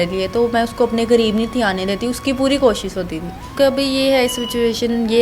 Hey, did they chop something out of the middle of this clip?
yes; 1 cut; at 3.4 s

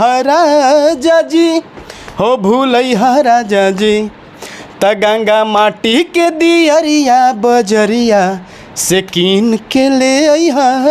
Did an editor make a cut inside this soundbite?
no; 0 cuts

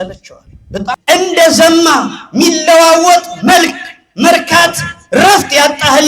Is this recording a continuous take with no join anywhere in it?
no; 1 cut; at 1.0 s

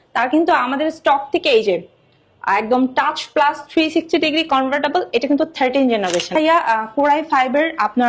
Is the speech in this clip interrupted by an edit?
yes; 1 cut; at 6.4 s

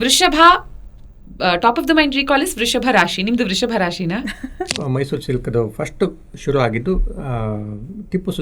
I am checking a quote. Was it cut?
yes; 1 cut; at 4.7 s

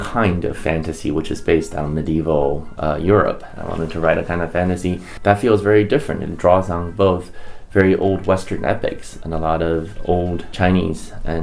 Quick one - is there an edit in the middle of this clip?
yes; 3 cuts; at 3.5 s, 5.1 s, 10.5 s

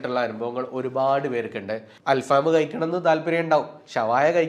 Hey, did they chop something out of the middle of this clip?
yes; 1 cut; at 1.9 s

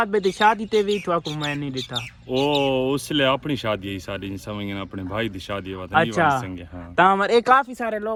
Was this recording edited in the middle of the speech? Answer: no; 0 cuts

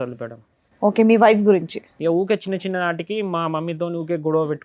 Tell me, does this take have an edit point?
yes; 1 cut; at 1.8 s

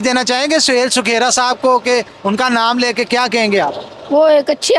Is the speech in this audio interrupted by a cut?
no; 0 cuts

